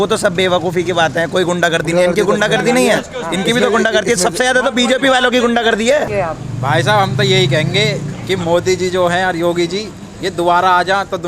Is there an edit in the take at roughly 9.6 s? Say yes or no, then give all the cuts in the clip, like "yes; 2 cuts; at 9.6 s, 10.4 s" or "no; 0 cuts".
no; 1 cut; at 6.1 s